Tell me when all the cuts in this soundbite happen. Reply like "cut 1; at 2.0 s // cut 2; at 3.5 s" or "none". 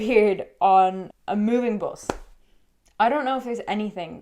cut 1; at 1.1 s